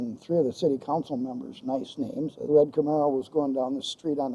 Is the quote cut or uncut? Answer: cut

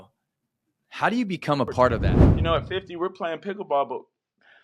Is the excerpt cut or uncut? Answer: cut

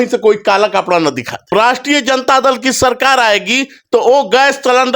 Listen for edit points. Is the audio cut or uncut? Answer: cut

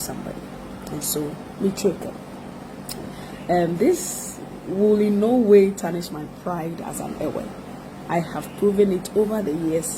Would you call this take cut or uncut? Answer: uncut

